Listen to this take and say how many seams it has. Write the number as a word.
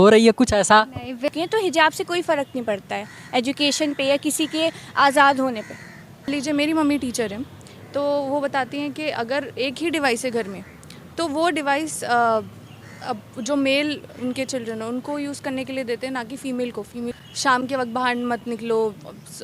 three